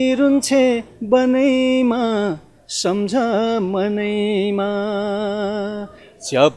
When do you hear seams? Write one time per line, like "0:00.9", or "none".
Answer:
none